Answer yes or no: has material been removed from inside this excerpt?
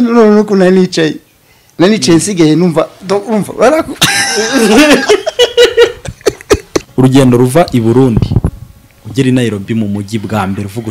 yes